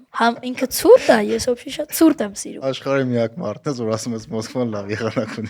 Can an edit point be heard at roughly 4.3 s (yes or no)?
no